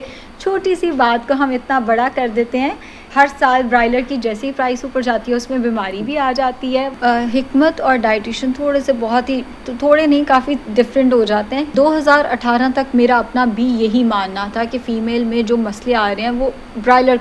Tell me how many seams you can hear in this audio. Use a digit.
3